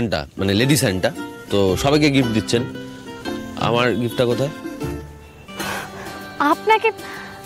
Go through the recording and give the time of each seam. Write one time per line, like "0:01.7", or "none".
none